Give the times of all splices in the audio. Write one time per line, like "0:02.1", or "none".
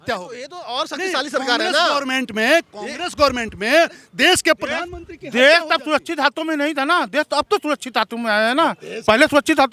none